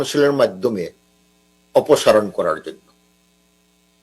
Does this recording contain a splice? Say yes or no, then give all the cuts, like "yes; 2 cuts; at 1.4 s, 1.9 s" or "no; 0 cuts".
no; 0 cuts